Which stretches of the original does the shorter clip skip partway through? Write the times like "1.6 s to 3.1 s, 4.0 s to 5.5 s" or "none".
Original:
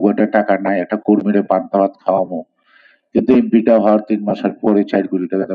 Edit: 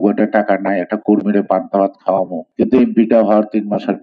2.4 s to 3.0 s